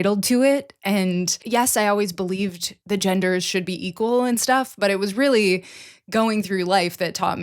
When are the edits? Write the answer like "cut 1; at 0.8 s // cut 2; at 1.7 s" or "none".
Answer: cut 1; at 1.3 s // cut 2; at 2.7 s